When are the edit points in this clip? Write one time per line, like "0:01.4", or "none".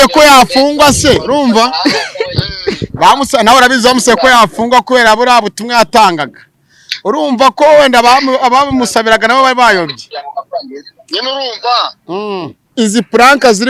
0:12.7